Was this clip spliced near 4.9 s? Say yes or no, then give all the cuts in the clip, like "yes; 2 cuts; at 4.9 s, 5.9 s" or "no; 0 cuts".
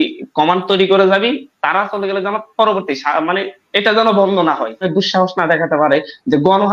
yes; 1 cut; at 4.9 s